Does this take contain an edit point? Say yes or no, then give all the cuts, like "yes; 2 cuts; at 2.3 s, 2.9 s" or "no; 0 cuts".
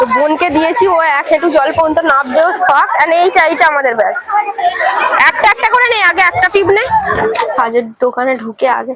yes; 1 cut; at 7.5 s